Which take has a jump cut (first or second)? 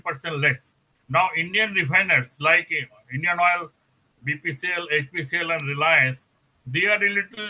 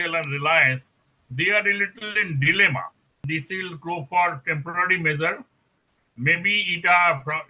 second